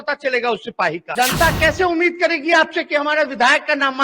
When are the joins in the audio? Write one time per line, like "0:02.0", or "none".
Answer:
0:01.0